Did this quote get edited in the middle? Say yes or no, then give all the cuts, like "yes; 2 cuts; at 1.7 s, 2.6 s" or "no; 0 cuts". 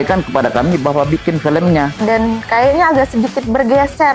yes; 1 cut; at 2.0 s